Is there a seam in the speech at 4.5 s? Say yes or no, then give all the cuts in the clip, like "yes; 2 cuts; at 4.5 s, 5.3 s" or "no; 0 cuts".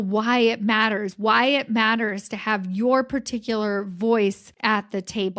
yes; 1 cut; at 4.5 s